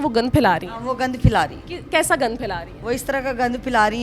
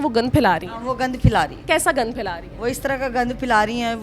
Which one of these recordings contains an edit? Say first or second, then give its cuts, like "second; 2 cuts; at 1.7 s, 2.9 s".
second; 1 cut; at 1.6 s